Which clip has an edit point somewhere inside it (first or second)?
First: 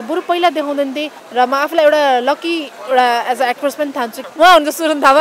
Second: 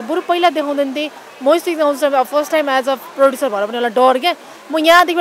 first